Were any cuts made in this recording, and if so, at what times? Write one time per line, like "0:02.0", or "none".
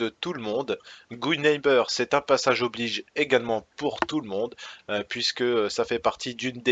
0:01.6